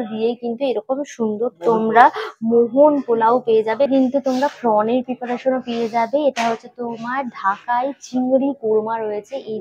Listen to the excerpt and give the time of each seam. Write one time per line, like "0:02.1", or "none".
none